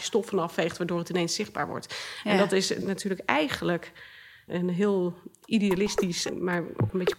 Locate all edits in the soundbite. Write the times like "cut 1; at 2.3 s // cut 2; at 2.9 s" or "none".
cut 1; at 2.8 s // cut 2; at 4.5 s // cut 3; at 6.2 s